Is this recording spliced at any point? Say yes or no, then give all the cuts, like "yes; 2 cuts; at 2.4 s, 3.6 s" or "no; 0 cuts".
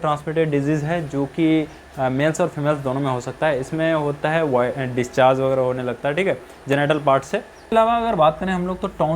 yes; 1 cut; at 7.7 s